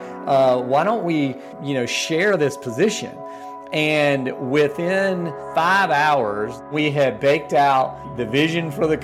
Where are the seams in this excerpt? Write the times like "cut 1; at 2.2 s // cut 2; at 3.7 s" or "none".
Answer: cut 1; at 1.5 s // cut 2; at 5.4 s // cut 3; at 6.6 s // cut 4; at 8.1 s

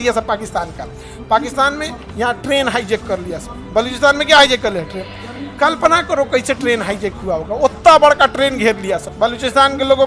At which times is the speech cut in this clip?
cut 1; at 9.1 s

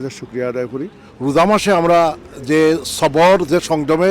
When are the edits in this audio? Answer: cut 1; at 1.0 s

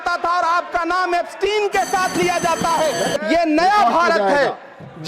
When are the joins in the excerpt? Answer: cut 1; at 3.1 s

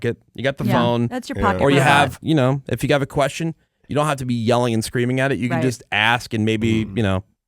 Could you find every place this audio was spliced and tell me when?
cut 1; at 2.2 s

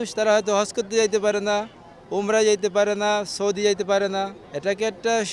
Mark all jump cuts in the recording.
cut 1; at 4.4 s

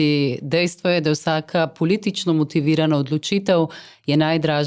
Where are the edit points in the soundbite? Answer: none

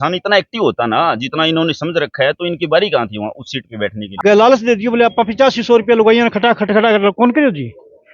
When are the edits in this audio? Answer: cut 1; at 4.0 s

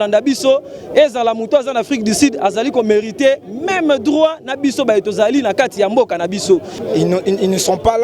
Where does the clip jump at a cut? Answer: cut 1; at 6.8 s

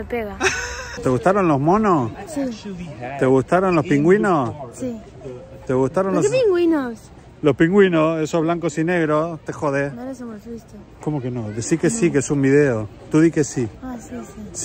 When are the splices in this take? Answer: cut 1; at 1.0 s // cut 2; at 2.2 s

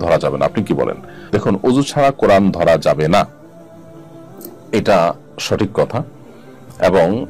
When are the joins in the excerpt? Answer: none

